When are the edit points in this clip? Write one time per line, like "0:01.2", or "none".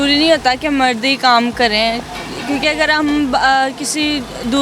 none